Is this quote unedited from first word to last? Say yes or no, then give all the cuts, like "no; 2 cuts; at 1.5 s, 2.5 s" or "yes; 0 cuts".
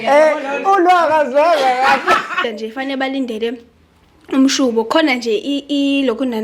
no; 1 cut; at 2.4 s